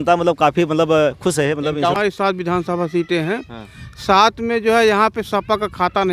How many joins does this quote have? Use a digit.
1